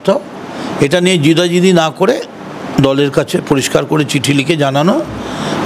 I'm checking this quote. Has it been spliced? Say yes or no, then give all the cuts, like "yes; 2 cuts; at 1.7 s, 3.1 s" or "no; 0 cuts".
no; 0 cuts